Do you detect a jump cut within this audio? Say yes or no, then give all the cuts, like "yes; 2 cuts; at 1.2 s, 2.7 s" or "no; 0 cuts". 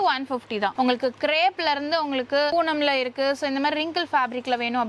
yes; 2 cuts; at 0.7 s, 2.5 s